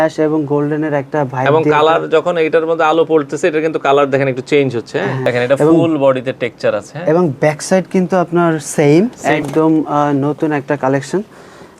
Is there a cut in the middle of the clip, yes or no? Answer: yes